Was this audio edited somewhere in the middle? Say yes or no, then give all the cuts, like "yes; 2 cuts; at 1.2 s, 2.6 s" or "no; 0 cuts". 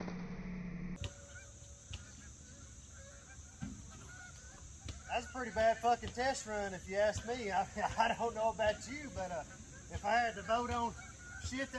yes; 1 cut; at 1.0 s